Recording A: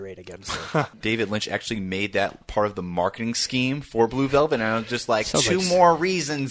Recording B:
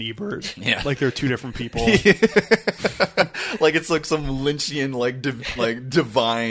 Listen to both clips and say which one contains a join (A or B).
A